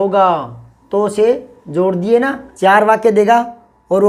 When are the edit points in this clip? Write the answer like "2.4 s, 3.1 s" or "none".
2.4 s